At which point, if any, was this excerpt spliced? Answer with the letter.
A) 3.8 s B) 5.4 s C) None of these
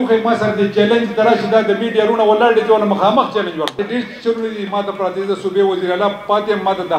A